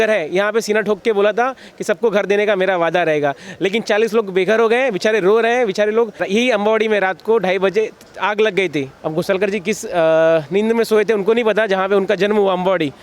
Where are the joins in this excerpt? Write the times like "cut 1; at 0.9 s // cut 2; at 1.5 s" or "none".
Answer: cut 1; at 6.2 s // cut 2; at 9.0 s